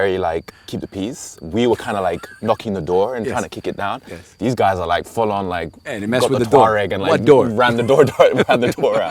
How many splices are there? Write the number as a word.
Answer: zero